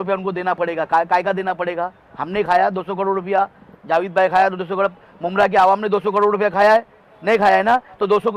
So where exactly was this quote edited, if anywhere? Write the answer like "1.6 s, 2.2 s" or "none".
none